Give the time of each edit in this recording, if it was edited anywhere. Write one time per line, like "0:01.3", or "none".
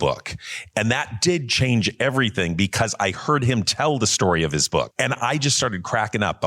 0:04.9